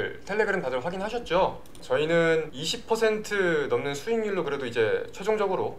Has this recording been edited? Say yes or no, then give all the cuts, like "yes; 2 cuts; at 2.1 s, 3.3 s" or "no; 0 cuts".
yes; 1 cut; at 1.8 s